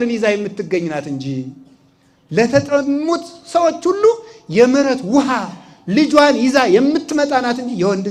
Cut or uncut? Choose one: uncut